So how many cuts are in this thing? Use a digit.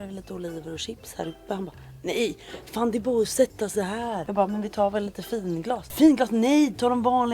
2